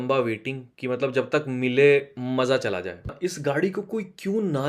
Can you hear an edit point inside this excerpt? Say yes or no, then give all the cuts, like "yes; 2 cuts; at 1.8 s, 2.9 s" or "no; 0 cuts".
yes; 1 cut; at 3.2 s